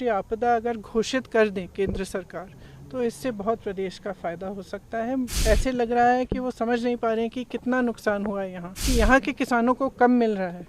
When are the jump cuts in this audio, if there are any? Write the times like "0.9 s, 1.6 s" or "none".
5.3 s, 8.8 s